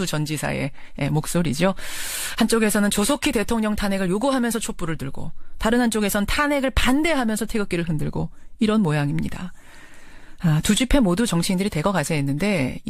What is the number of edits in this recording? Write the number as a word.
one